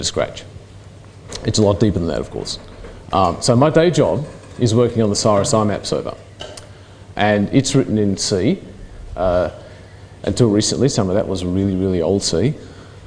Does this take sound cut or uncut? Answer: cut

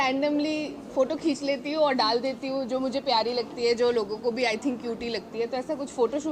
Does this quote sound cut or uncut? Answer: uncut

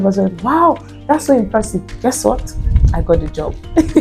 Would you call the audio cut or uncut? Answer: uncut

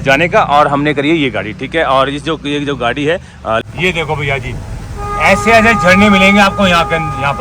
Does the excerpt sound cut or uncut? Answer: cut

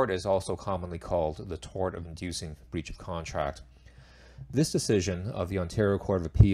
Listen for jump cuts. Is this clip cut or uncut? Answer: cut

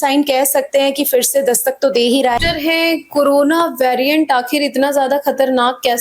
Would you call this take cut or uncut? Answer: cut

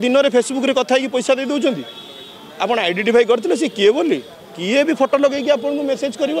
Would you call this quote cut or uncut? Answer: uncut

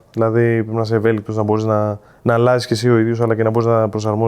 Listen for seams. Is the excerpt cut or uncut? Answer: uncut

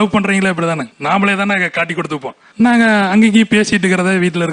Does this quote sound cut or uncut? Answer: uncut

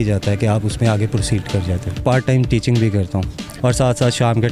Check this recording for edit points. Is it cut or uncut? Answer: cut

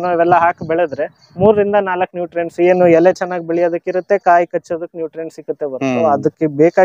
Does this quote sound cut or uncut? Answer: uncut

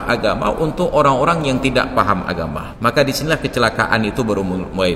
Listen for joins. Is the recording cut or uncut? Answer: cut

